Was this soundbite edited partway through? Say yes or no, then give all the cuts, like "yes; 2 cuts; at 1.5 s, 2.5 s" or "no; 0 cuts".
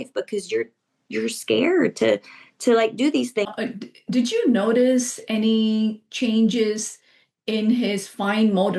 yes; 1 cut; at 3.5 s